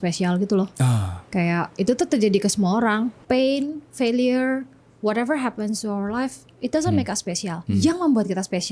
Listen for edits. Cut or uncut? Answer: cut